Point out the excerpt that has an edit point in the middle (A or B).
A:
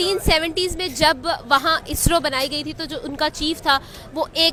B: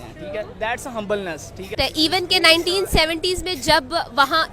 B